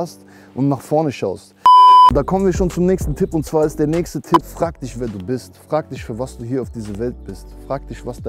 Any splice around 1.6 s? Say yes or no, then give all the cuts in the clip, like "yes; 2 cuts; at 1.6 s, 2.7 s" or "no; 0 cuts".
no; 1 cut; at 4.5 s